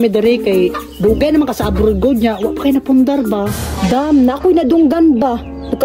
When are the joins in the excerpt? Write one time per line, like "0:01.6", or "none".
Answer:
none